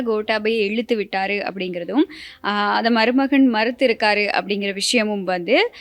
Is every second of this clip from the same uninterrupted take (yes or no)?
yes